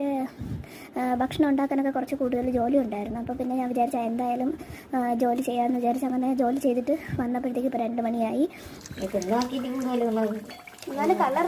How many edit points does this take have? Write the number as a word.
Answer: one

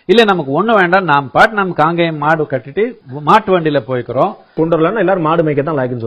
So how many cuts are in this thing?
two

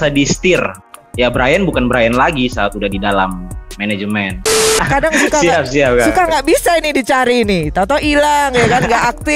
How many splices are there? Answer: two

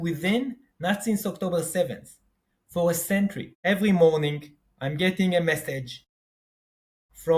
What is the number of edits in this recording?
one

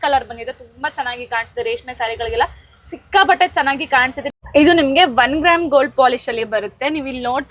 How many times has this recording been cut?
one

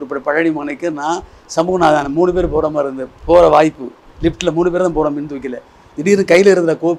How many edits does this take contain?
zero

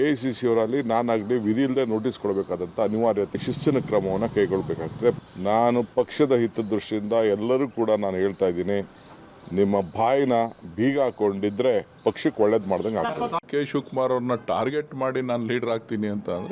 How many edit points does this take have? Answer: one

